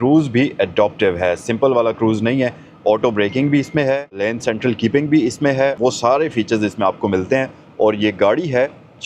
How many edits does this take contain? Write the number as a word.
one